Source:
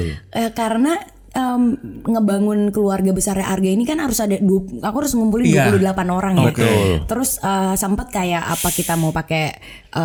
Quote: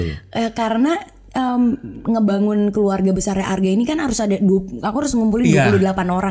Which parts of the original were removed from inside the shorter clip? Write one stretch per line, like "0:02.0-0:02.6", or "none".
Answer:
none